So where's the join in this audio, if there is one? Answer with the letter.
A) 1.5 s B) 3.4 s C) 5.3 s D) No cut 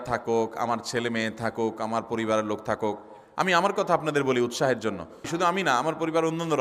C